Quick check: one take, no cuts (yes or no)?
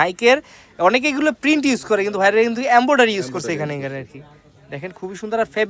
yes